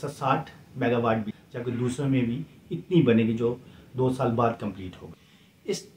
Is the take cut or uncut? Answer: uncut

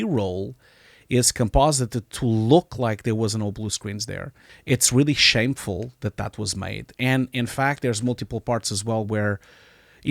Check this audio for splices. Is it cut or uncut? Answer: cut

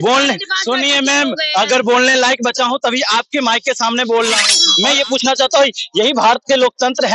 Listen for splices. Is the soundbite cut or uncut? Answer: cut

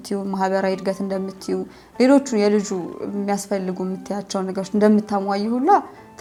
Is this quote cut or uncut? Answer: uncut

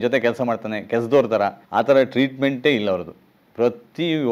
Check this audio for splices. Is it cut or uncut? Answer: cut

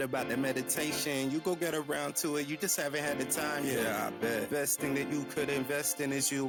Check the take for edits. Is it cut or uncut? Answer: uncut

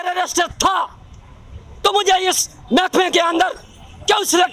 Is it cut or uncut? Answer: uncut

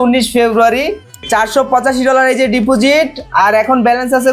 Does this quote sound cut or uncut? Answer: cut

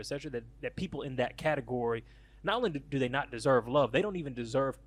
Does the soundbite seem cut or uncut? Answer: uncut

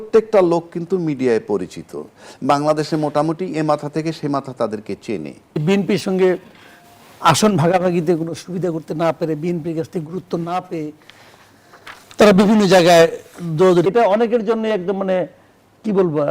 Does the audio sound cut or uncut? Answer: cut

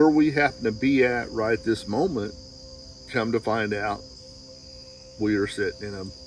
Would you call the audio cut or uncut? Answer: cut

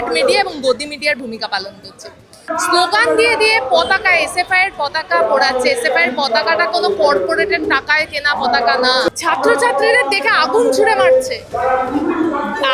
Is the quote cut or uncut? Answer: cut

